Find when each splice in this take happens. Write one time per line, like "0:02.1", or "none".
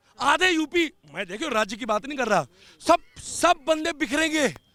none

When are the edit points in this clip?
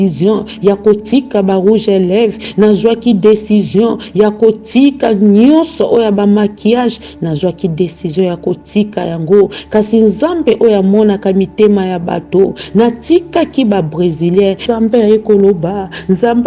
0:14.6

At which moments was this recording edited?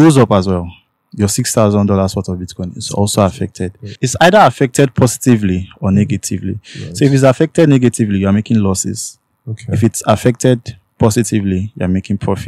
0:04.0

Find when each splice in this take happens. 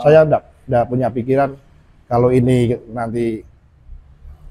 none

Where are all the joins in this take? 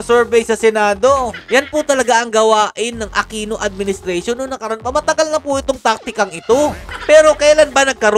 0:01.4
0:06.9

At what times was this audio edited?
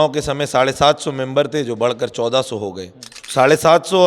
0:03.2

